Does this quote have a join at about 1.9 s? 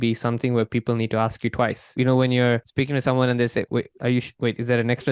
yes; 3 cuts; at 1.9 s, 2.7 s, 4.3 s

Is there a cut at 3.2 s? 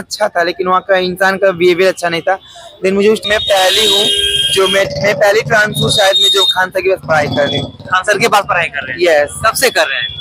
yes; 1 cut; at 3.2 s

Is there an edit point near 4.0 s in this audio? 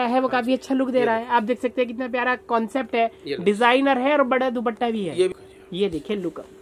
no; 1 cut; at 5.3 s

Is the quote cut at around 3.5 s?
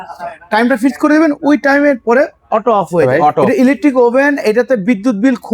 yes; 1 cut; at 3.5 s

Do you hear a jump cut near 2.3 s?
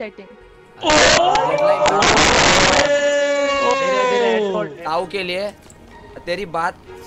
no; 2 cuts; at 4.7 s, 5.7 s

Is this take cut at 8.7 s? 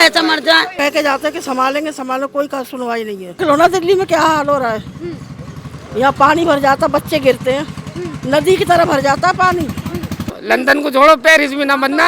no; 3 cuts; at 0.7 s, 3.4 s, 10.4 s

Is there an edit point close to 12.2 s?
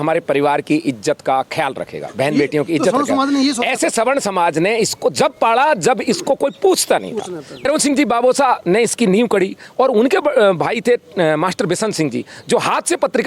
no; 1 cut; at 7.6 s

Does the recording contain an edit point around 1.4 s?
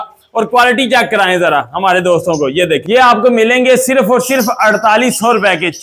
no; 1 cut; at 2.8 s

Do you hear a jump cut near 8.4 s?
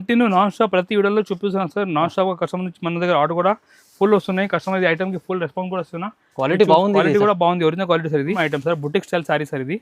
yes; 1 cut; at 8.4 s

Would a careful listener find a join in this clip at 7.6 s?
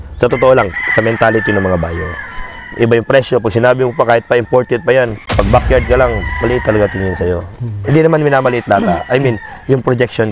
no; 1 cut; at 5.2 s

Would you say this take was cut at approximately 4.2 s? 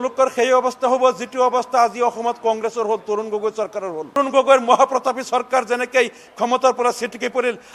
yes; 1 cut; at 4.2 s

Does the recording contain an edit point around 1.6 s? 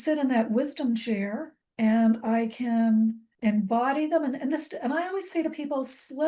yes; 1 cut; at 1.6 s

